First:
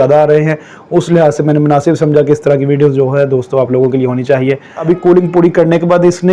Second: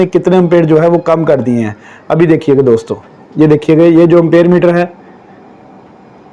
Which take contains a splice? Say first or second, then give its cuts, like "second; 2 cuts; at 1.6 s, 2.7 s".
first; 1 cut; at 4.8 s